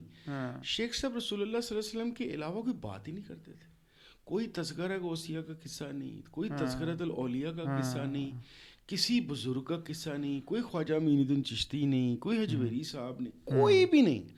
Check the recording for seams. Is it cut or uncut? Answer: uncut